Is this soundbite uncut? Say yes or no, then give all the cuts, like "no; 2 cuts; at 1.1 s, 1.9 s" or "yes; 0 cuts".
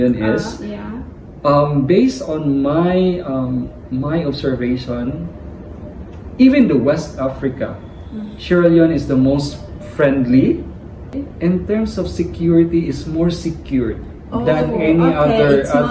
yes; 0 cuts